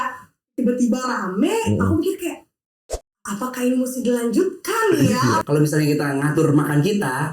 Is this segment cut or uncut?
cut